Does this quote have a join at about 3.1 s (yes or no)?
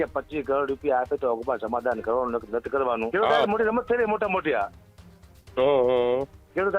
yes